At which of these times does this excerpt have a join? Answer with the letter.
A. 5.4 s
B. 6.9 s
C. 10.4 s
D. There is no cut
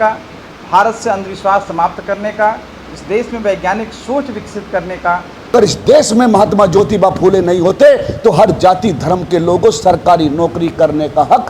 A